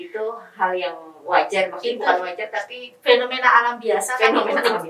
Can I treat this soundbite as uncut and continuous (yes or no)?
yes